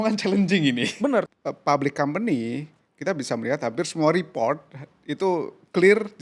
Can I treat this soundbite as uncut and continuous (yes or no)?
no